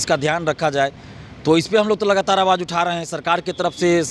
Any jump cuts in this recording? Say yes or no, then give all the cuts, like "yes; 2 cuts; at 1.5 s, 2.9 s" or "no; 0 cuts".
no; 0 cuts